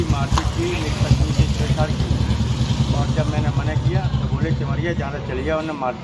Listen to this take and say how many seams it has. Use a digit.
0